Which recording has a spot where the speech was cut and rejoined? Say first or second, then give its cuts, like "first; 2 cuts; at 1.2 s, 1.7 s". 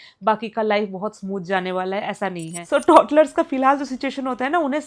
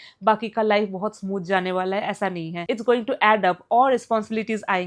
first; 1 cut; at 2.6 s